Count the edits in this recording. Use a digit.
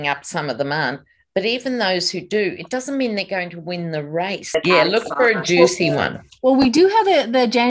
1